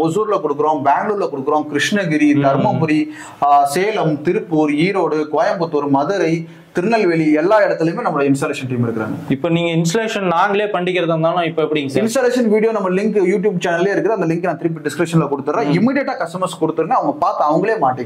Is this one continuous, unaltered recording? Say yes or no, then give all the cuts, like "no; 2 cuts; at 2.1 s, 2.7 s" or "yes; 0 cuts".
yes; 0 cuts